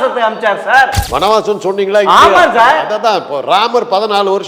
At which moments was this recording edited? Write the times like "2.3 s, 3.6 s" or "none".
1.0 s

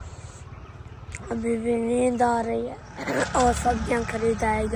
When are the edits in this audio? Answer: 2.9 s

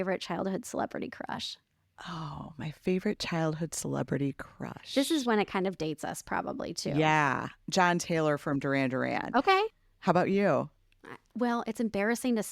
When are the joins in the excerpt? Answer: 7.6 s, 9.7 s

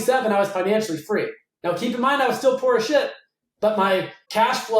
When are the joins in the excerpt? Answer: none

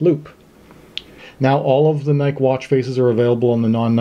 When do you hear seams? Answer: 1.1 s

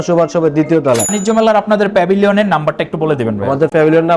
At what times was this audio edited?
1.2 s

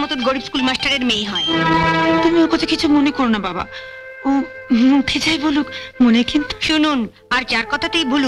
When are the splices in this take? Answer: 2.2 s

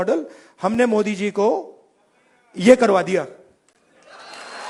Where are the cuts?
none

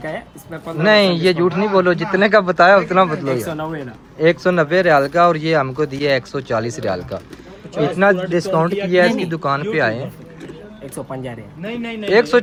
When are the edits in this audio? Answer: none

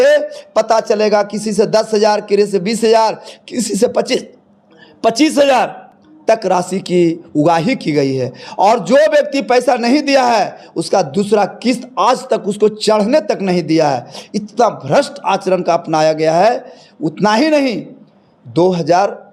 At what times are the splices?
none

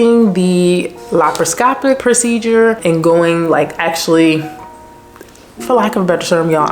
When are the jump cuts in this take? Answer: 2.0 s, 2.8 s

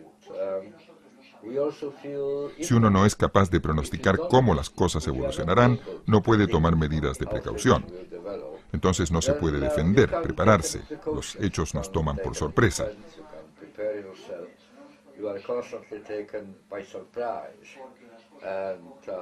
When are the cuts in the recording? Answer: 8.0 s

